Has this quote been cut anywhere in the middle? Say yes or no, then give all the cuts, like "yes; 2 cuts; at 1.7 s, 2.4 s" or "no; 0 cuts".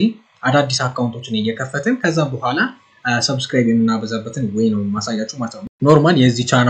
yes; 1 cut; at 5.6 s